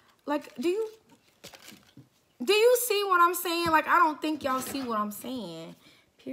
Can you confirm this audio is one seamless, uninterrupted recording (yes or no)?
yes